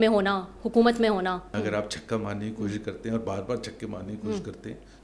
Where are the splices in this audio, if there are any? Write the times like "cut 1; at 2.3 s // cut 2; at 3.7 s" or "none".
cut 1; at 1.5 s